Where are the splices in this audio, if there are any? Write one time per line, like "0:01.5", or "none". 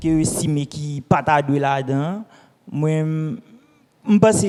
none